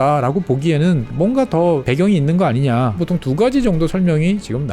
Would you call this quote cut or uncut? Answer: cut